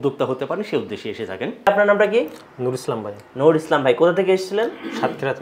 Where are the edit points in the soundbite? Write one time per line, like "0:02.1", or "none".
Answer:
0:01.7